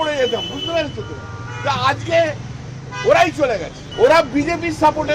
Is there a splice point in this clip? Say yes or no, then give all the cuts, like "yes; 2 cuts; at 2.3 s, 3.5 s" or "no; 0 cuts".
yes; 1 cut; at 3.8 s